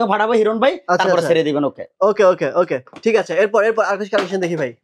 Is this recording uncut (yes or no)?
yes